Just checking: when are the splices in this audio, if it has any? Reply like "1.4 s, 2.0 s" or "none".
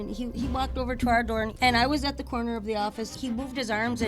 1.5 s, 3.1 s